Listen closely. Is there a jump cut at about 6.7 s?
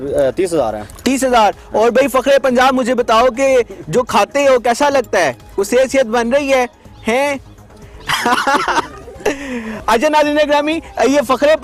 no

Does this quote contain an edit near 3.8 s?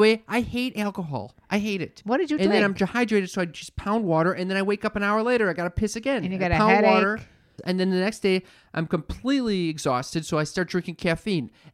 no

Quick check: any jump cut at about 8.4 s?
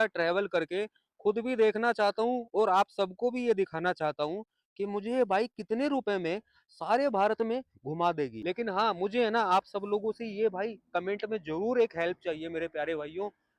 yes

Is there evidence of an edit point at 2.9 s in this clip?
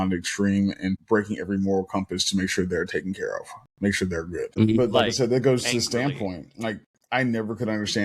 no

